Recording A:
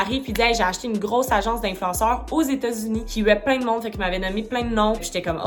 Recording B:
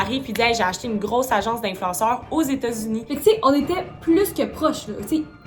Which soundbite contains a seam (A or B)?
B